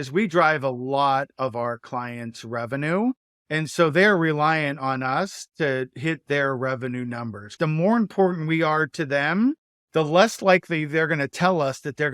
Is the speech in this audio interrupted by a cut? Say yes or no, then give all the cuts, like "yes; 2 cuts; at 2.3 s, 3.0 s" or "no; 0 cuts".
yes; 3 cuts; at 3.3 s, 7.6 s, 9.7 s